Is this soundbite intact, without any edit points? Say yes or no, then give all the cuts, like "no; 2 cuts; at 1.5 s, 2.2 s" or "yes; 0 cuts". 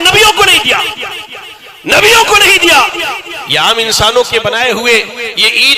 yes; 0 cuts